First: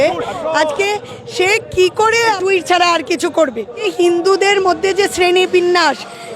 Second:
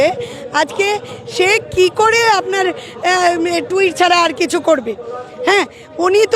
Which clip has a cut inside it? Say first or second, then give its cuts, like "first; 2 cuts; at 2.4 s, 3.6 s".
first; 2 cuts; at 2.4 s, 3.9 s